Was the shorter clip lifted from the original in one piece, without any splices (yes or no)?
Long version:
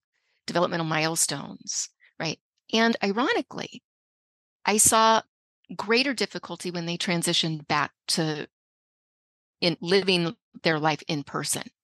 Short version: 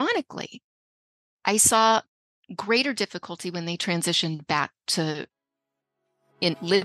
yes